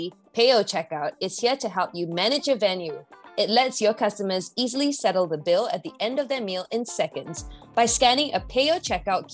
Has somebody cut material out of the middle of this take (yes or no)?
no